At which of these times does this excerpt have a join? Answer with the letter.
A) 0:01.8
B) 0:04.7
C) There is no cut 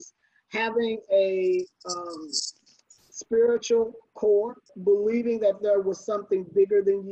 B